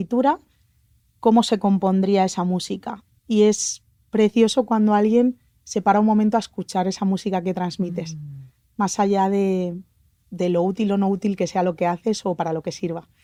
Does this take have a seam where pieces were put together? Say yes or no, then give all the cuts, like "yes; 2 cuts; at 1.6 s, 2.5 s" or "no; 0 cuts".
no; 0 cuts